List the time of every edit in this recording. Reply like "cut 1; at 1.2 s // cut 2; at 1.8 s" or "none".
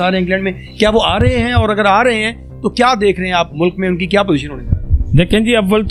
none